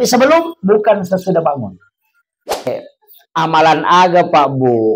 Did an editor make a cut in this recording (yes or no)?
yes